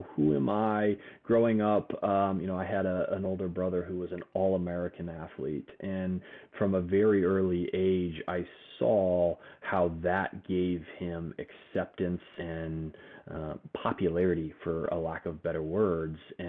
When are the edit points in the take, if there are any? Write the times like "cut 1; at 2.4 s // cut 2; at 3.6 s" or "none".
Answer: cut 1; at 12.3 s